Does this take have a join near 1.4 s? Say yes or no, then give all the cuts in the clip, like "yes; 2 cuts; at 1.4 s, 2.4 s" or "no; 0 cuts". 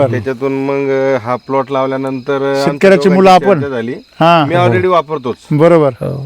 no; 0 cuts